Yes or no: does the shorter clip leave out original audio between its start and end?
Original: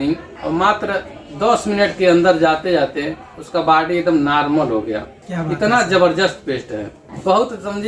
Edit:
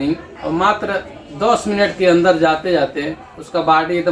no